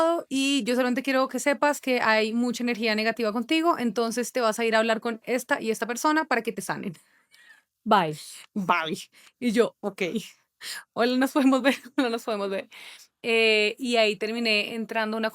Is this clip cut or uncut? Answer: uncut